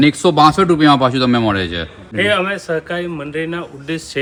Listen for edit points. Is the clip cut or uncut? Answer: uncut